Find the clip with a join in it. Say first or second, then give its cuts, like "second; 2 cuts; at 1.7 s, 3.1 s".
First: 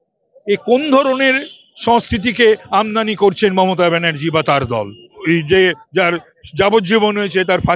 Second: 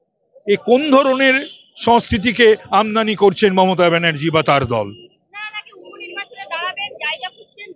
first; 1 cut; at 5.2 s